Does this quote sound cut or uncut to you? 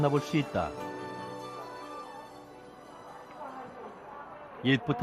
uncut